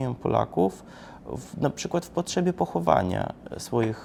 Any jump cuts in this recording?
no; 0 cuts

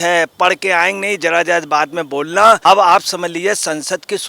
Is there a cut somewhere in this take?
yes; 1 cut; at 2.6 s

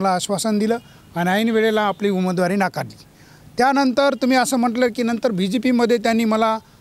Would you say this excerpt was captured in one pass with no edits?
yes; 0 cuts

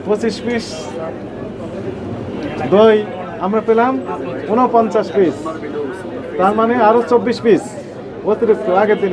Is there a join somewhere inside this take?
no; 0 cuts

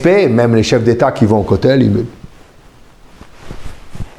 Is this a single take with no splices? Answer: yes; 0 cuts

